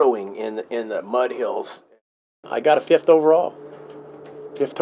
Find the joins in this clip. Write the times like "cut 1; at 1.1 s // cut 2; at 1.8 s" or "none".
cut 1; at 2.1 s